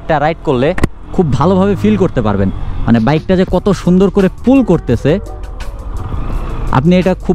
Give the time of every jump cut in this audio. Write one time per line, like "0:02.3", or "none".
none